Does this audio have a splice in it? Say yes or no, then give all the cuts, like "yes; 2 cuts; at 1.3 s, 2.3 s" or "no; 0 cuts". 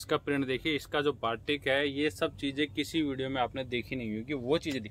no; 0 cuts